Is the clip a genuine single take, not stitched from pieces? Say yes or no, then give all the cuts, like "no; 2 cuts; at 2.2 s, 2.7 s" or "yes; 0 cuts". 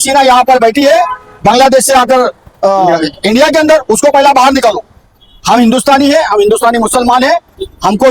yes; 0 cuts